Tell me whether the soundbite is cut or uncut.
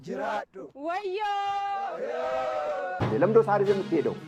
cut